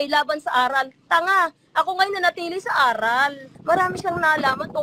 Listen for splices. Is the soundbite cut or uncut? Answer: cut